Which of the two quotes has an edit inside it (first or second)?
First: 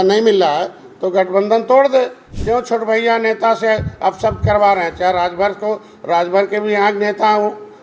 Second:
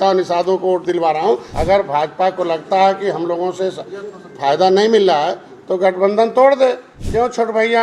second